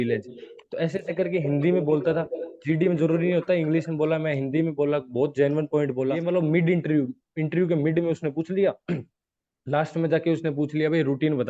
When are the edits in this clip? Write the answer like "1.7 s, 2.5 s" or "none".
6.2 s